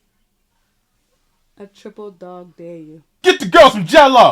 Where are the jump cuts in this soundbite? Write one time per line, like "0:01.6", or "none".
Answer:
0:03.1

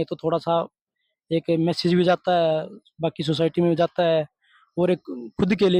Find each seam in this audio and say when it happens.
none

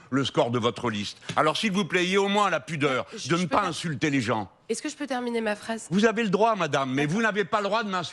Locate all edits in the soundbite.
none

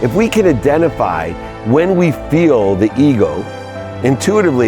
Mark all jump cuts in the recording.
none

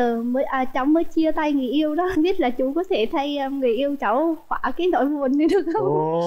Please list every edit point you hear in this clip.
none

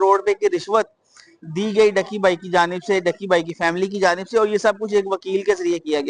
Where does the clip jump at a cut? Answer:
none

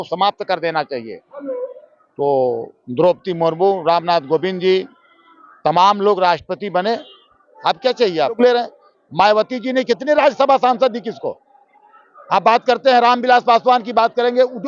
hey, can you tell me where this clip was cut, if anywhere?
0:08.4

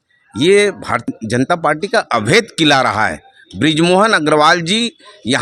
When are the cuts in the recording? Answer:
0:01.1

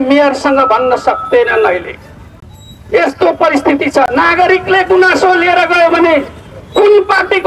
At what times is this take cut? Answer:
none

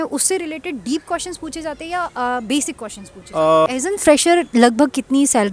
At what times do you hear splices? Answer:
0:03.7

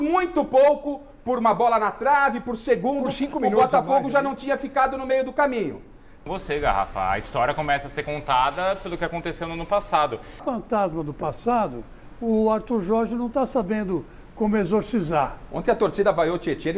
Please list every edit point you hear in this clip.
0:03.9
0:06.2
0:10.4

